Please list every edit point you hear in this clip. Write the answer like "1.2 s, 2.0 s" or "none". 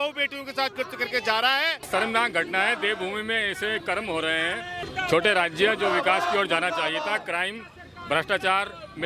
1.9 s, 4.9 s